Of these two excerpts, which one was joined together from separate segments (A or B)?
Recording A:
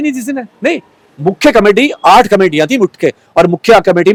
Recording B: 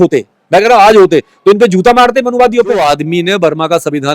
B